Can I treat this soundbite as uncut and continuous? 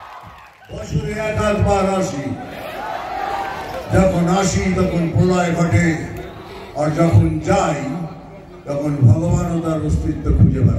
yes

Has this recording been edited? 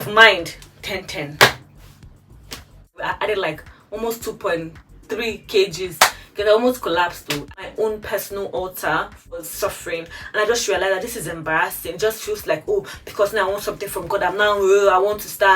yes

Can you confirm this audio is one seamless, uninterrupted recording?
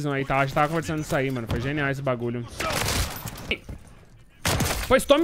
no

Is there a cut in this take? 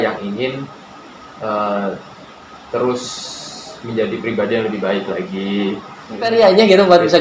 yes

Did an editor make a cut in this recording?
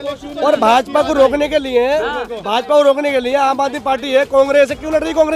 no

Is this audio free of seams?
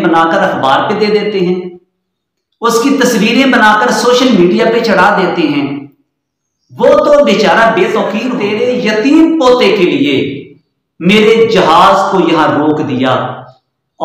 no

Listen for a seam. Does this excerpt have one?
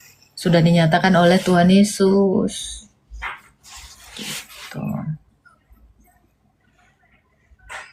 no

